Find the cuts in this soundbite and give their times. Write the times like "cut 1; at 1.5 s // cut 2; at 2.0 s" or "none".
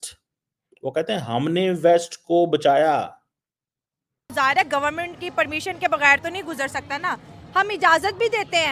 cut 1; at 4.3 s